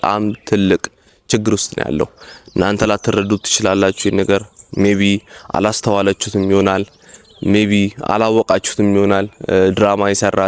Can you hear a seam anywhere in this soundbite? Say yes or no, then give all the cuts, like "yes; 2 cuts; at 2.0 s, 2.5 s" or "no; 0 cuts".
no; 0 cuts